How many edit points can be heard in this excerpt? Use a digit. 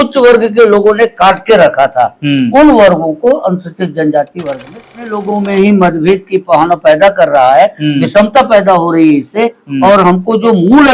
1